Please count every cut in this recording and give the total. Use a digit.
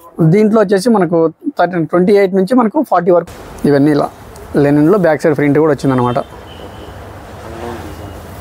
1